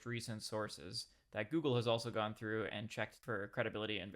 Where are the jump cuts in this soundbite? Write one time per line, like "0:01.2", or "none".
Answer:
0:03.2

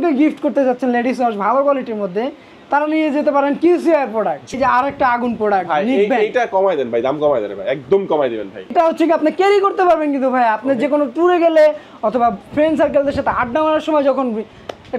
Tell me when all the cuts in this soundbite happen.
0:04.6
0:08.7

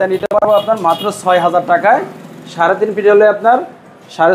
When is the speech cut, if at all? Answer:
none

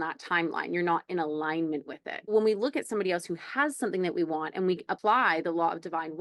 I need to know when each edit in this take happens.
0:02.3
0:04.9

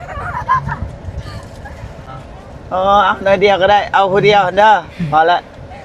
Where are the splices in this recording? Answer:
0:02.0

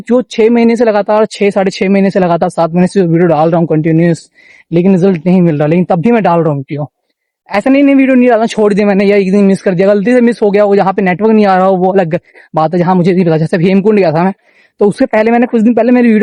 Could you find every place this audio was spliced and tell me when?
none

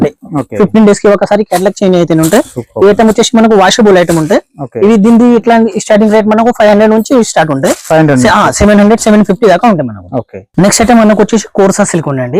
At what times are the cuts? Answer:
none

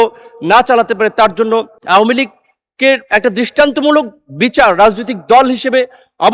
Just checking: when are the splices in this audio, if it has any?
0:01.8

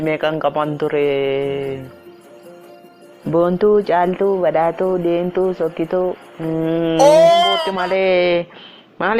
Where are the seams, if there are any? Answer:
0:07.7

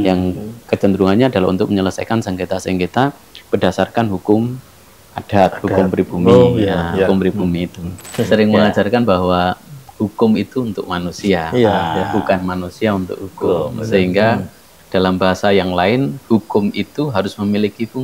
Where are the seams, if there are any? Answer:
0:08.1

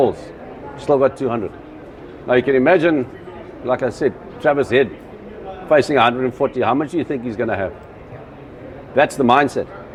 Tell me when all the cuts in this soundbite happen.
none

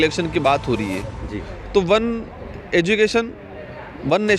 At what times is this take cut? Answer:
none

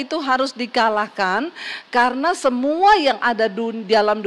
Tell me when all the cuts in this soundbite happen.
none

